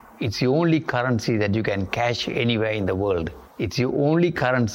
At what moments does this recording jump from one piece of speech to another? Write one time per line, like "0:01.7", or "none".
0:03.4